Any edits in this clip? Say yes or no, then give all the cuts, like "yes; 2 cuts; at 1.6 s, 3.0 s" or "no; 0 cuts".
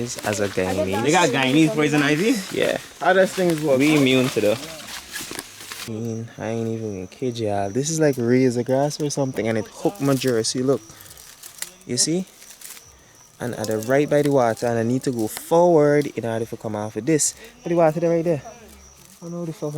yes; 1 cut; at 5.8 s